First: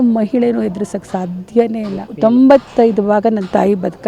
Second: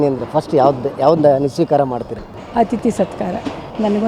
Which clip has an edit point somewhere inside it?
first; 1 cut; at 2.1 s

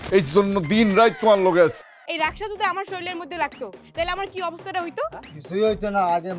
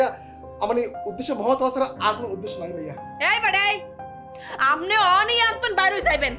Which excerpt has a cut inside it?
first; 1 cut; at 1.9 s

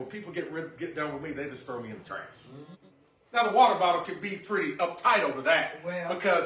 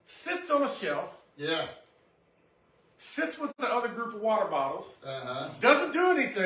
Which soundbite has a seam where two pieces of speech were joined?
first; 1 cut; at 2.7 s

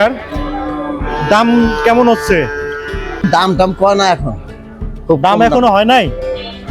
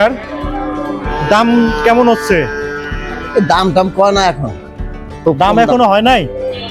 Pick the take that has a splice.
first; 1 cut; at 3.3 s

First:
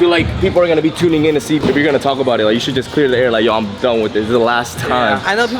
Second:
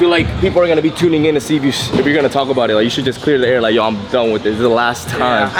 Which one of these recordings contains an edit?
first; 1 cut; at 1.6 s

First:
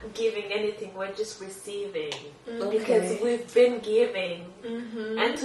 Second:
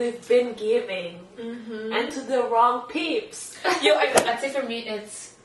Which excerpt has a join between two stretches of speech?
second; 1 cut; at 4.2 s

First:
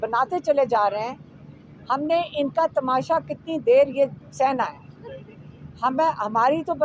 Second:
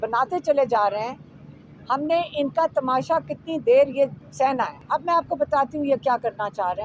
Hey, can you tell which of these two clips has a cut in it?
second; 1 cut; at 4.8 s

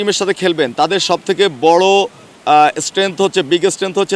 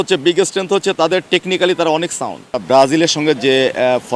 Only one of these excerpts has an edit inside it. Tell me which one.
second; 1 cut; at 2.6 s

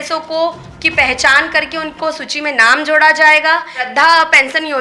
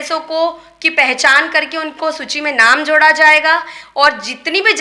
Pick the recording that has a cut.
first; 1 cut; at 3.8 s

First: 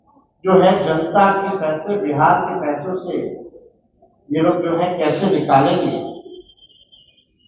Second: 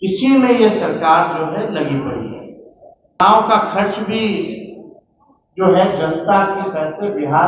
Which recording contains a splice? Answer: second; 1 cut; at 3.2 s

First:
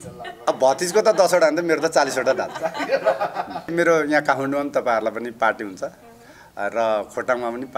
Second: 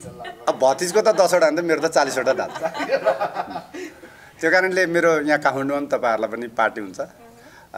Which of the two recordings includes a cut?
first; 1 cut; at 3.7 s

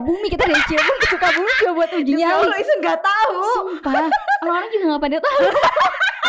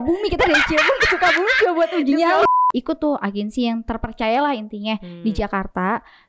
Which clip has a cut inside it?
second; 1 cut; at 2.5 s

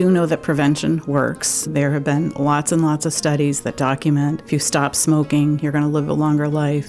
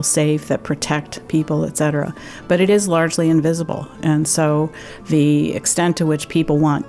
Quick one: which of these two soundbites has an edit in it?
first; 2 cuts; at 1.7 s, 4.4 s

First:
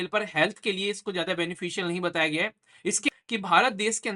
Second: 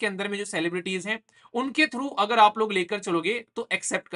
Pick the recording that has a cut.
first; 1 cut; at 3.1 s

